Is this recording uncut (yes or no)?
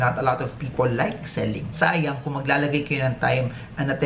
no